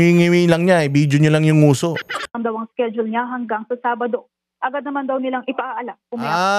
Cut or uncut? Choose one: cut